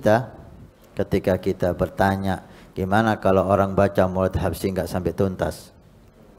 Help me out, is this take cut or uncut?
uncut